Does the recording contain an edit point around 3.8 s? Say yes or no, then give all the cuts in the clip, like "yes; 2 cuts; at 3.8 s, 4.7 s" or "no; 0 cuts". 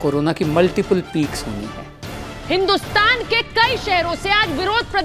no; 1 cut; at 2.3 s